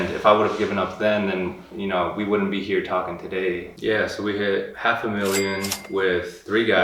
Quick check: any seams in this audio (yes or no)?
yes